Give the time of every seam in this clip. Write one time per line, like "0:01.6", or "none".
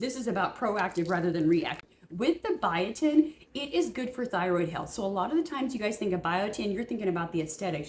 0:01.8